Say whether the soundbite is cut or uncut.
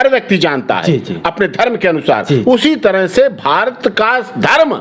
uncut